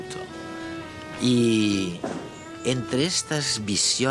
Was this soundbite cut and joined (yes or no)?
no